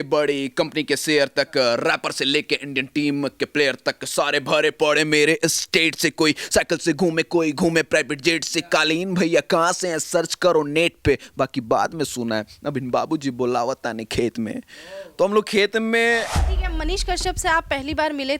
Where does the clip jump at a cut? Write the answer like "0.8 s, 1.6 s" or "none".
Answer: 16.4 s